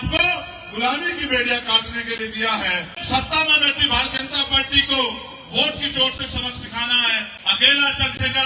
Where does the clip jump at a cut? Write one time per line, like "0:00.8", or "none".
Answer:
0:02.9
0:07.4